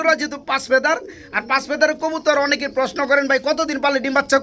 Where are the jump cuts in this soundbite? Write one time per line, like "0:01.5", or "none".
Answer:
none